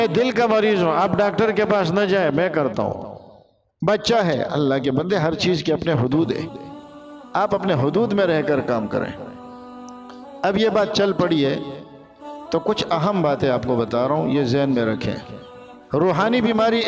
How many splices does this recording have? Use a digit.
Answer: 0